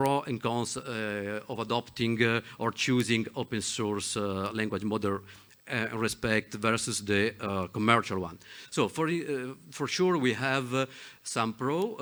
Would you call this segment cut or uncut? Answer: uncut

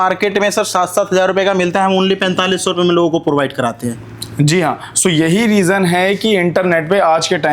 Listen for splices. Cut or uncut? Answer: uncut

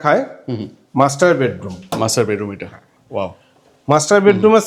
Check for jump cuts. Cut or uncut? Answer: uncut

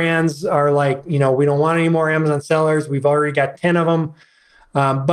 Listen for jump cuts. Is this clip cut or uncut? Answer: uncut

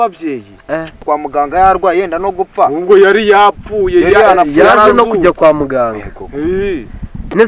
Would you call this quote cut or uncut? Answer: cut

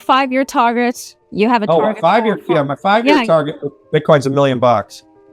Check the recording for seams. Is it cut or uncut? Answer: uncut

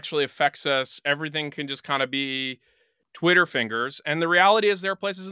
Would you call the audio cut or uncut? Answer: cut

